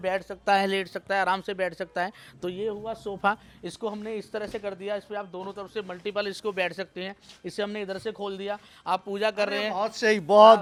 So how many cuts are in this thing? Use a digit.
0